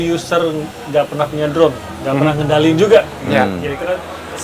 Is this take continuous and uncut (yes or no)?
yes